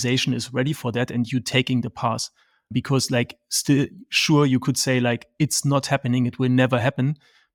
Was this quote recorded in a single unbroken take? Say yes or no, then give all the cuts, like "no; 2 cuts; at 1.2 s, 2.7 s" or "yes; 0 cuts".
yes; 0 cuts